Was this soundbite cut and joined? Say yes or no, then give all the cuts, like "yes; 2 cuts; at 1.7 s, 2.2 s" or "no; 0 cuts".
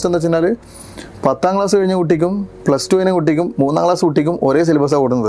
no; 0 cuts